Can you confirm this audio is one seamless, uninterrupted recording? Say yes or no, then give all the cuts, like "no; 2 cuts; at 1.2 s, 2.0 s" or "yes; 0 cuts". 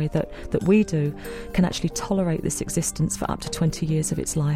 yes; 0 cuts